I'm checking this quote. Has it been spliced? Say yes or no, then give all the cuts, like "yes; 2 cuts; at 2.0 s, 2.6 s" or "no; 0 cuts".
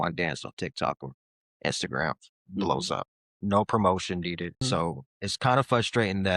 yes; 1 cut; at 4.6 s